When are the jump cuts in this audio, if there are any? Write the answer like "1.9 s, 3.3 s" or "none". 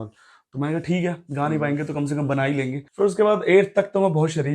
2.8 s